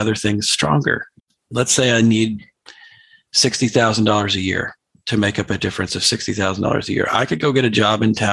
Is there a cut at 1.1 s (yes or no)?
yes